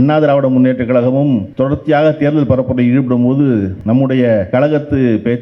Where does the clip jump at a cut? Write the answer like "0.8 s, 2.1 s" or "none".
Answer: 1.5 s, 3.8 s, 4.5 s